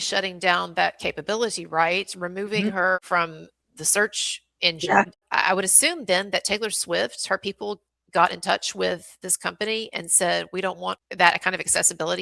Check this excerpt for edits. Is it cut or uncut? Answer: cut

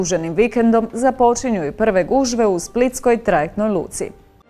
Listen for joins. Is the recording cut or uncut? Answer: uncut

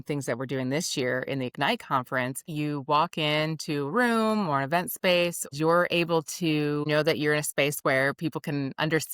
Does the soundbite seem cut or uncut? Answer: cut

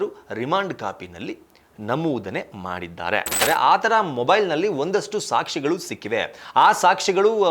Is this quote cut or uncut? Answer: cut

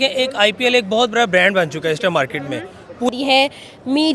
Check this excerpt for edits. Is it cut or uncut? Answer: cut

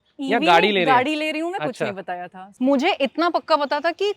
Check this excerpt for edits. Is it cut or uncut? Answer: cut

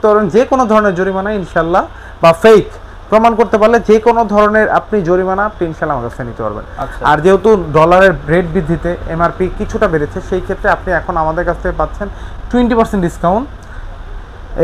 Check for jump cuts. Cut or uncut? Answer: uncut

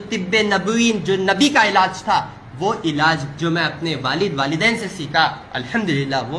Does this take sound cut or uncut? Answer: cut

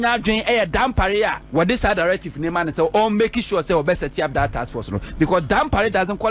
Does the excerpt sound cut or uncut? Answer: cut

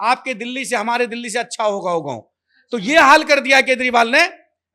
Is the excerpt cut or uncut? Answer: uncut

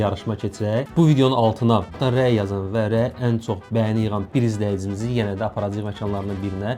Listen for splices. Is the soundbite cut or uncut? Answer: uncut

